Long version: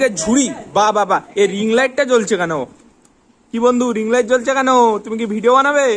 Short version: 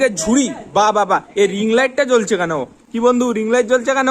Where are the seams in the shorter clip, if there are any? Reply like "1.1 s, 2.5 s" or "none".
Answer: 2.8 s